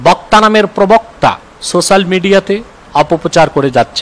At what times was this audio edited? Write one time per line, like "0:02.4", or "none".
0:01.5
0:02.8

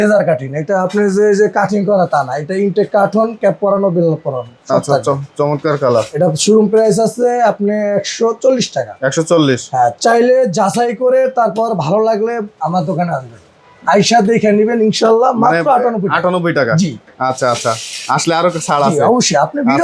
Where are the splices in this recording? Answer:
none

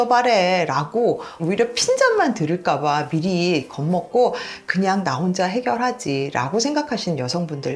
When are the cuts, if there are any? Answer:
0:01.3

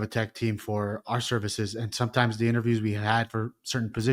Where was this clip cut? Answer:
none

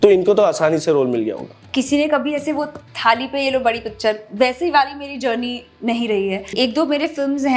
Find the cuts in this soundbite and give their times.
0:01.6
0:06.5

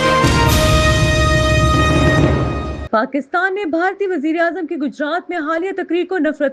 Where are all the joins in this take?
0:02.8

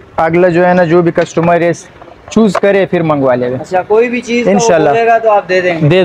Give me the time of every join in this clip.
none

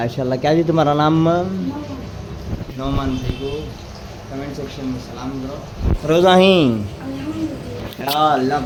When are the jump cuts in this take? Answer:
none

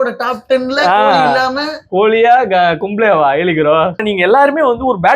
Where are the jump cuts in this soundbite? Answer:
0:04.0

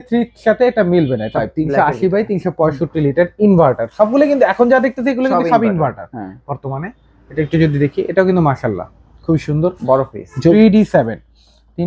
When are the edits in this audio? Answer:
0:01.3
0:10.5

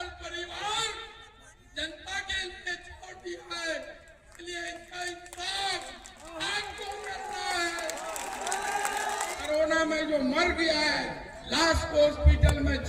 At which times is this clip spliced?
0:09.3

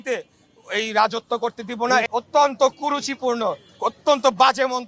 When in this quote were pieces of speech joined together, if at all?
0:02.1

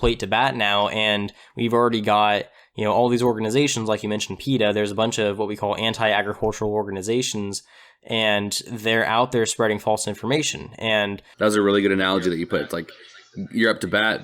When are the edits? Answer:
0:11.2

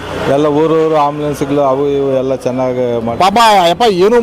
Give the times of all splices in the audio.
0:03.1

